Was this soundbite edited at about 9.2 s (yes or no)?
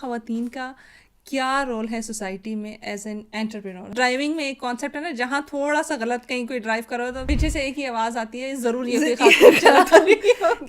no